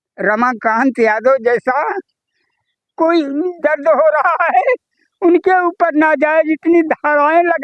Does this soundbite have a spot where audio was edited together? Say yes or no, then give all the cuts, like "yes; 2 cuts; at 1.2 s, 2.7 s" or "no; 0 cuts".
no; 0 cuts